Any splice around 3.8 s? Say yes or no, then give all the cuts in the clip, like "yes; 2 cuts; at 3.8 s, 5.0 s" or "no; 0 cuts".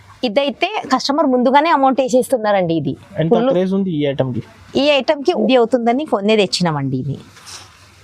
no; 1 cut; at 5.3 s